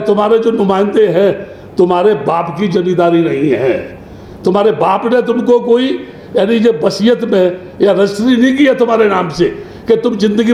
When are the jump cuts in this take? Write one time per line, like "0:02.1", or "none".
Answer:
none